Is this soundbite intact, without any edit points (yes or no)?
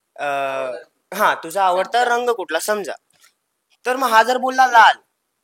yes